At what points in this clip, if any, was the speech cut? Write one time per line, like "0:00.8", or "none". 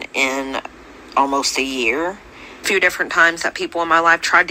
0:02.7